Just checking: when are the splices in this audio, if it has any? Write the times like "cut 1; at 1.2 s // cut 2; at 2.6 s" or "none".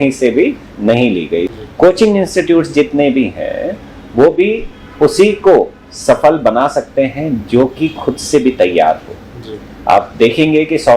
cut 1; at 1.5 s